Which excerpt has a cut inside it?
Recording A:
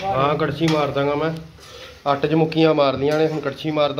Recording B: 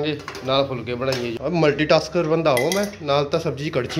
B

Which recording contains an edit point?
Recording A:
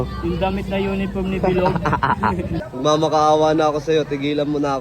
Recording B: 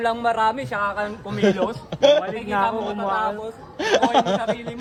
A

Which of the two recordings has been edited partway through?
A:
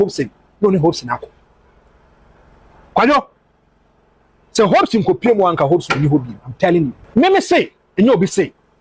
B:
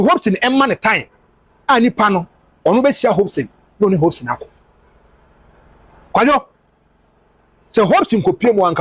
A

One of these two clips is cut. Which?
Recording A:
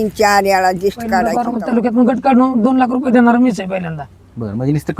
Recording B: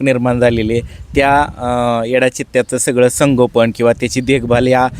A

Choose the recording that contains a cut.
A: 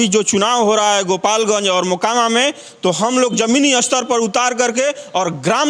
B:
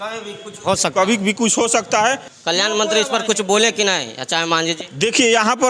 B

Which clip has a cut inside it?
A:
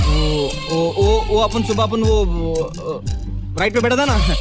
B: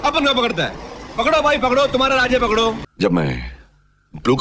B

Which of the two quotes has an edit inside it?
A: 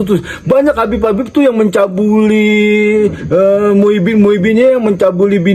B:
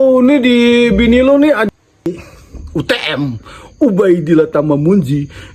B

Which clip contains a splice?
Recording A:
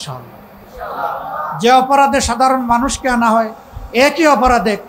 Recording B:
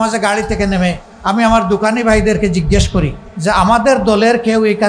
B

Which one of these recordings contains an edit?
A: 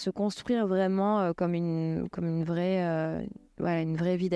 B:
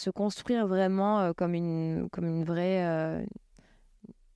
A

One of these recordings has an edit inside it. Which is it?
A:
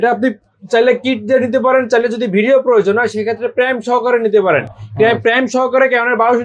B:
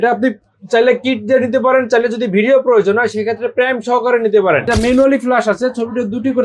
B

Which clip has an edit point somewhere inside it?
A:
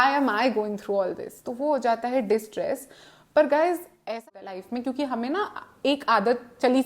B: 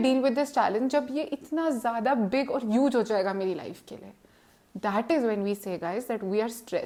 A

